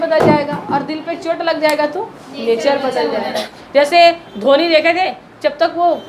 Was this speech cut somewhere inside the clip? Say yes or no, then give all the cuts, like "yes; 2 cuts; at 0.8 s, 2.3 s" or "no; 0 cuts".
yes; 1 cut; at 3.5 s